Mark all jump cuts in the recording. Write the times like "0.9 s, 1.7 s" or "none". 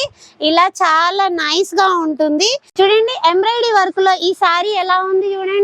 2.6 s